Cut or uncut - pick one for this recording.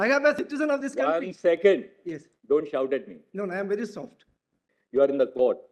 cut